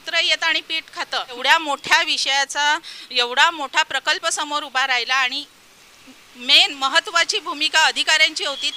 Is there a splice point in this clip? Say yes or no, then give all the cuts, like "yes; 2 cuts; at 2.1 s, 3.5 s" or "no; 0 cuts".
yes; 1 cut; at 1.3 s